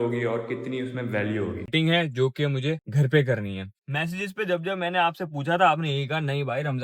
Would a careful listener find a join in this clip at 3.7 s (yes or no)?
yes